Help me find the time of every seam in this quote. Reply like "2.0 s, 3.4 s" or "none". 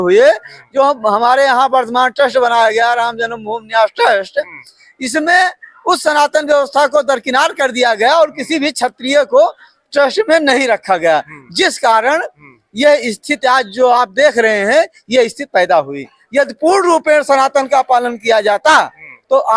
none